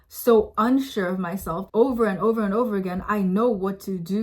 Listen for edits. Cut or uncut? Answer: cut